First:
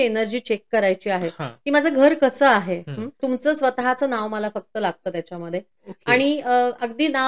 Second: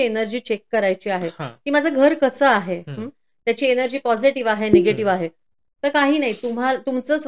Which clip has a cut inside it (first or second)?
first